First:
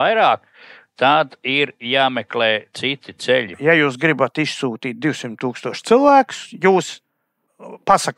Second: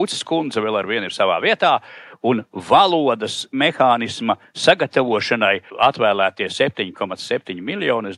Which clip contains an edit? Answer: first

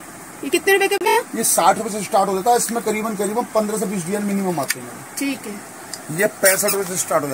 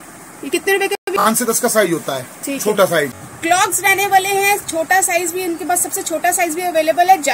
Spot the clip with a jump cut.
second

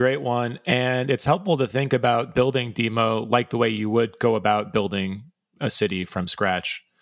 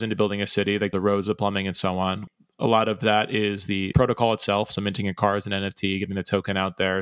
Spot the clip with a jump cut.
second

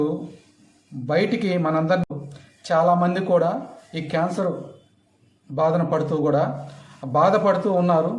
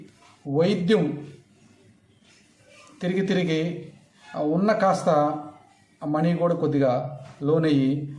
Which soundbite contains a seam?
first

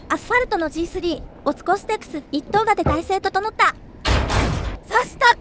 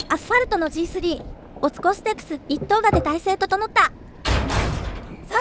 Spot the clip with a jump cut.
first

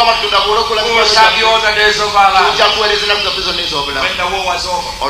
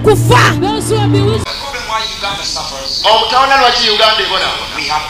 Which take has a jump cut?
second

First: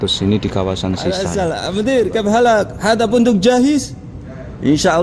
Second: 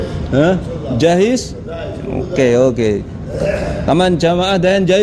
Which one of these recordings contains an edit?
first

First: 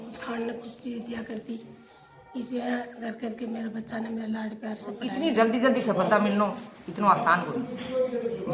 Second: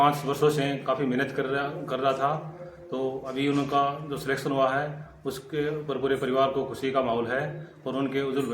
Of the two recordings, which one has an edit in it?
first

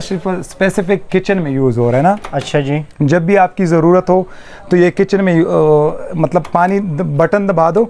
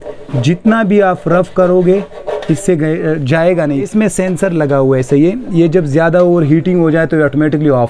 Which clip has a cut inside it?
second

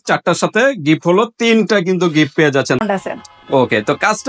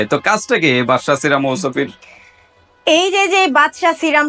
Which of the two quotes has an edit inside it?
first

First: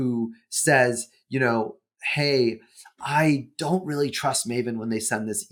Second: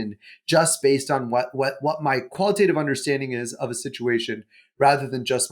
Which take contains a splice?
second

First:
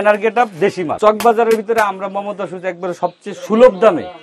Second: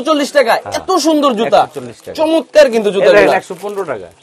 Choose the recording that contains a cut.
first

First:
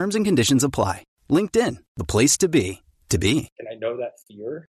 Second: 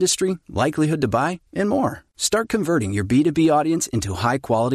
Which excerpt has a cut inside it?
first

